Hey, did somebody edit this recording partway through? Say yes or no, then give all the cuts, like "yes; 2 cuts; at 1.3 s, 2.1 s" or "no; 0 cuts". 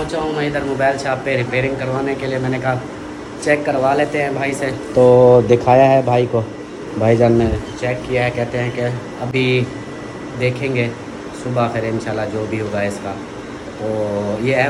no; 0 cuts